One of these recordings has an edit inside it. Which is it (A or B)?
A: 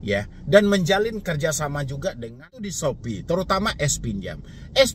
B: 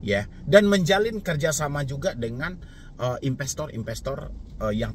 A